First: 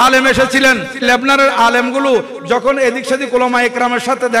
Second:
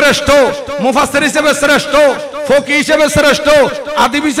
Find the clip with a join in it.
first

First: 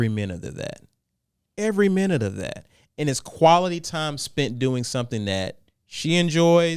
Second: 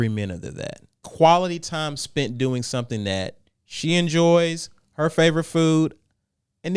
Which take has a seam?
second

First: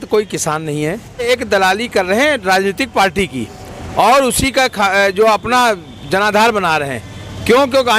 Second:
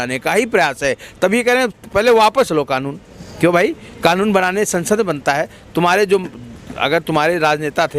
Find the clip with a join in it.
first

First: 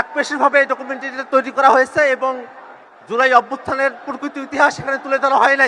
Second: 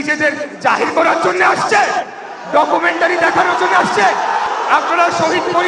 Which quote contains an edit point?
second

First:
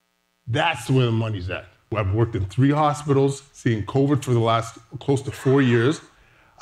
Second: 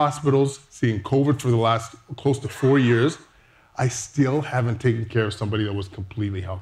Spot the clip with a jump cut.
first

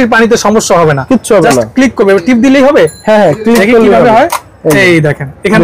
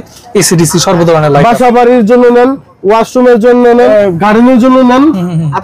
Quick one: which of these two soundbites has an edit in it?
second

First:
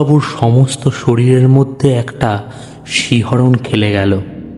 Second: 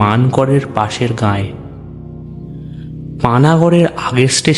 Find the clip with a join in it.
second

